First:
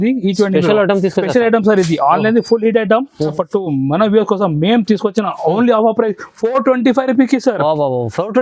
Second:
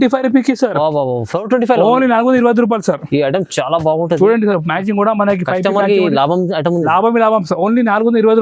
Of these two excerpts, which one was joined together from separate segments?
first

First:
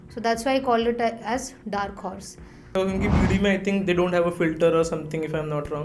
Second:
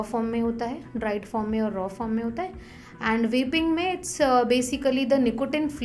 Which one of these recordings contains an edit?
first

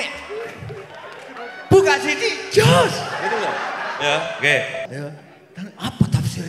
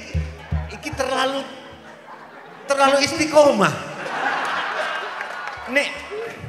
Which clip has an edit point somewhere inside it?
first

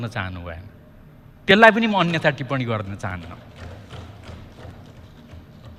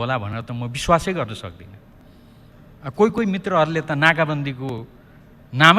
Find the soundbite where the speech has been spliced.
second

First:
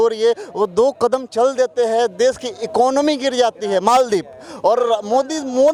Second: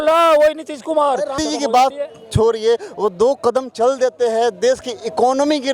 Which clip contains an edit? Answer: second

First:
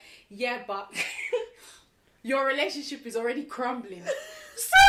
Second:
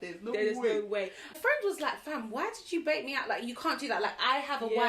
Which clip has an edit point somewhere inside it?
second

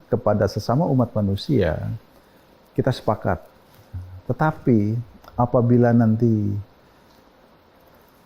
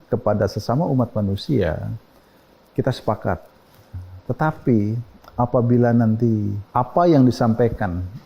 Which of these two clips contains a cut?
second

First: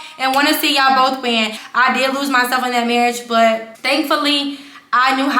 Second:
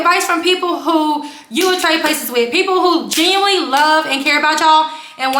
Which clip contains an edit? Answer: first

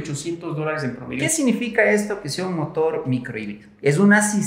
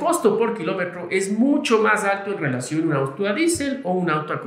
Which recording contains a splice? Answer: first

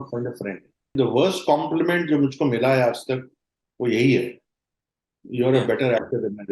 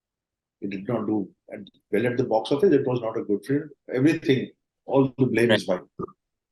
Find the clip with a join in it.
first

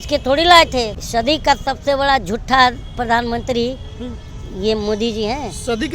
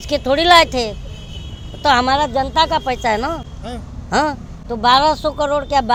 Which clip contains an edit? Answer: first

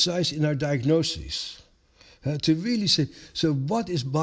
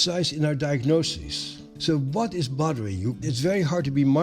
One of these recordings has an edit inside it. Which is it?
second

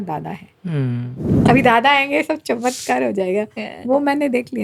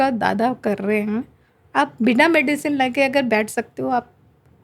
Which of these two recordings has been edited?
first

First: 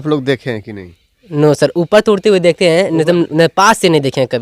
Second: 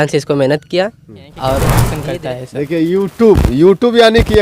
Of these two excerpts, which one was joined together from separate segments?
second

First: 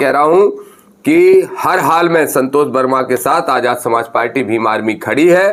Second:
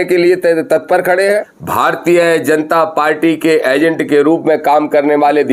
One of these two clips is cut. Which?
second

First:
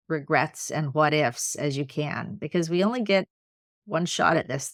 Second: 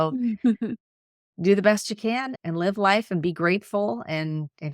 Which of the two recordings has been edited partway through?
second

